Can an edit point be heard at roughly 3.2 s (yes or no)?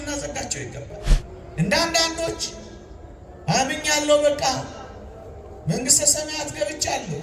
no